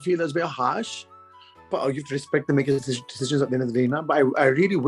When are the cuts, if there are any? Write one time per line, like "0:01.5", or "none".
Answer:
none